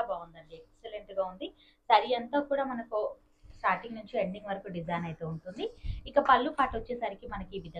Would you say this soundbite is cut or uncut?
uncut